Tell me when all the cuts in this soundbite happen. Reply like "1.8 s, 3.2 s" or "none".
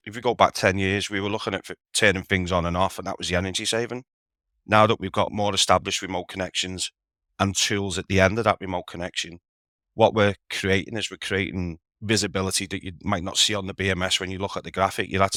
none